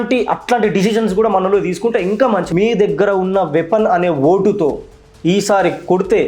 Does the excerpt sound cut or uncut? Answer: cut